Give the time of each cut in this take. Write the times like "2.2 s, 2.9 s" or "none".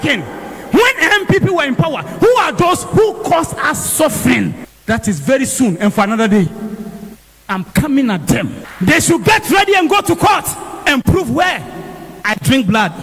none